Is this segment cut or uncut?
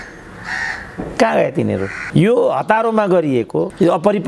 cut